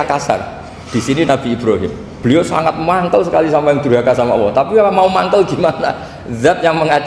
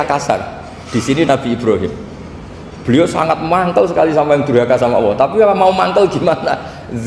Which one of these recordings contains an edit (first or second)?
first